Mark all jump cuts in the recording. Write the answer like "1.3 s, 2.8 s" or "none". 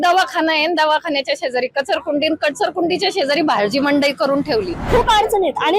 4.8 s